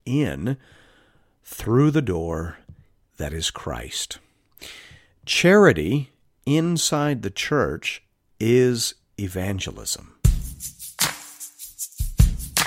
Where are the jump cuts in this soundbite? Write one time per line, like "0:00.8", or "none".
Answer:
0:10.1

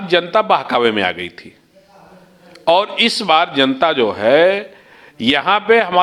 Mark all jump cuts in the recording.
none

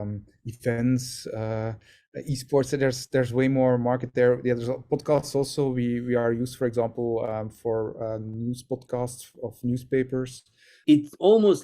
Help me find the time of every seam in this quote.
0:10.7

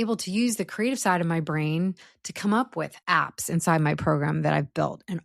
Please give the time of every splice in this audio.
0:03.0

